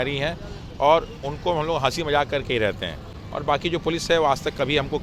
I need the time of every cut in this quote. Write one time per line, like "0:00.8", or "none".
none